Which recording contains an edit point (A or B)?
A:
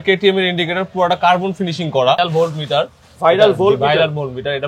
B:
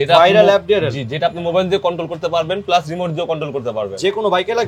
A